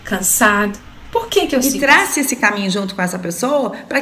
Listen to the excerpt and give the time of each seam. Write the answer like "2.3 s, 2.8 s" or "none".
1.6 s